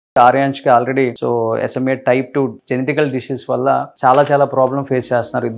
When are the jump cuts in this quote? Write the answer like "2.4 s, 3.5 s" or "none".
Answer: 1.2 s, 2.6 s